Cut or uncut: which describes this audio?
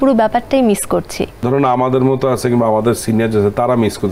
cut